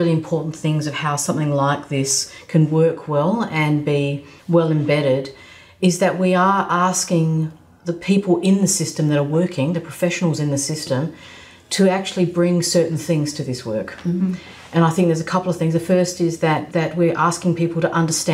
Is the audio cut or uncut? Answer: uncut